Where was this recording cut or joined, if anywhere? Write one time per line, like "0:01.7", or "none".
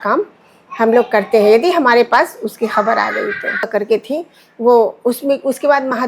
0:03.7